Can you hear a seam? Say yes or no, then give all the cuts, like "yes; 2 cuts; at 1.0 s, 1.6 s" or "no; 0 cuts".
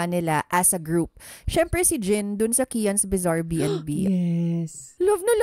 yes; 2 cuts; at 1.3 s, 4.6 s